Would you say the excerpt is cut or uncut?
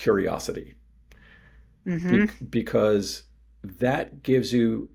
uncut